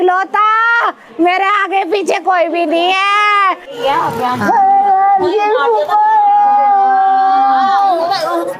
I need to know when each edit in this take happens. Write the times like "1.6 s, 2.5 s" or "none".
none